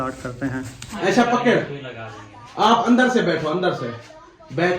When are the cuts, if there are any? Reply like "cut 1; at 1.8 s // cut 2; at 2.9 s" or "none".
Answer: cut 1; at 1.0 s